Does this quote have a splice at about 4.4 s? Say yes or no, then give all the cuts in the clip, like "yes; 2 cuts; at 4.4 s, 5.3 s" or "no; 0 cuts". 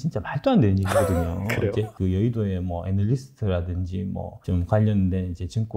yes; 2 cuts; at 1.9 s, 4.4 s